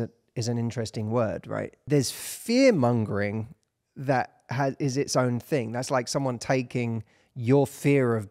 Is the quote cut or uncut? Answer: cut